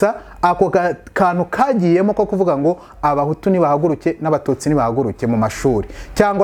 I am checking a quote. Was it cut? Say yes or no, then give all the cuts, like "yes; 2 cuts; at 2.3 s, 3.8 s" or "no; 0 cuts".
no; 0 cuts